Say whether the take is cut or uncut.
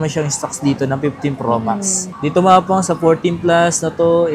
cut